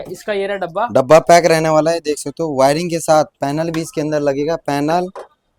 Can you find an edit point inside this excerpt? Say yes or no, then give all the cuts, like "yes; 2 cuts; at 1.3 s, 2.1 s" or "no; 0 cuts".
no; 0 cuts